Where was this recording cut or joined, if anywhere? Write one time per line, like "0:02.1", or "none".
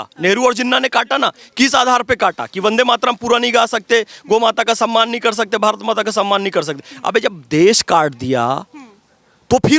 none